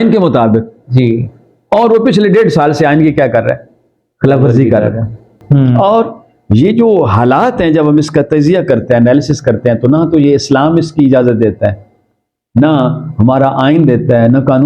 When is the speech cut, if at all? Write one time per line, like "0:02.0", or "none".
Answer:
0:05.3